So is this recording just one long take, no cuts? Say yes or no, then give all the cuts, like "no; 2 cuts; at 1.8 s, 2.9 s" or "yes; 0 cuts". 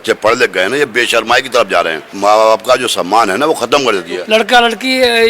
no; 2 cuts; at 2.1 s, 4.1 s